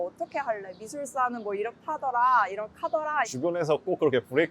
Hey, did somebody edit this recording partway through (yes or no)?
yes